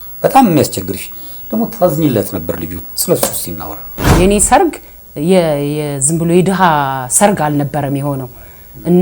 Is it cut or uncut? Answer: cut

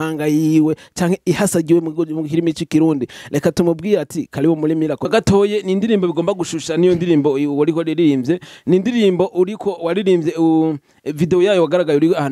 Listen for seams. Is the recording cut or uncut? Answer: cut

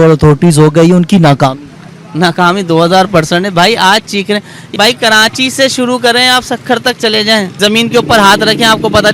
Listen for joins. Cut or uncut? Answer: cut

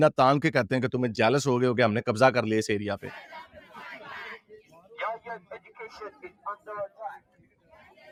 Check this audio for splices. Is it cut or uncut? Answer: uncut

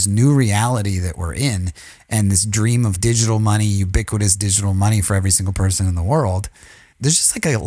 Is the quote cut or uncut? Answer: cut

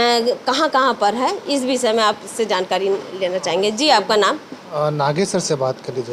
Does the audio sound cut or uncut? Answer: uncut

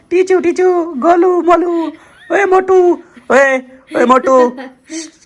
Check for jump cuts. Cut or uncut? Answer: uncut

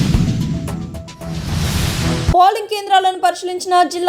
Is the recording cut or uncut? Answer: cut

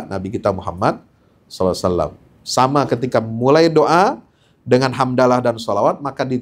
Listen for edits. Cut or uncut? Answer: uncut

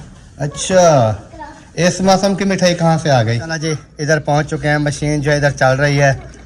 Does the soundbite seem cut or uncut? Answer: cut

